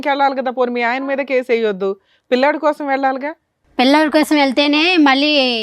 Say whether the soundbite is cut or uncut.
uncut